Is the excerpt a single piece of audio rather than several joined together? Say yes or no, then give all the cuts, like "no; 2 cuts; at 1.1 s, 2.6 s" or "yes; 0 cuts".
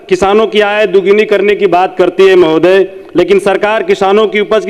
yes; 0 cuts